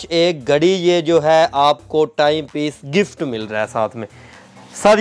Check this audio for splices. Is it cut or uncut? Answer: uncut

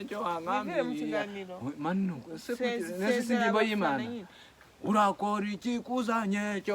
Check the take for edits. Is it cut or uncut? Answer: uncut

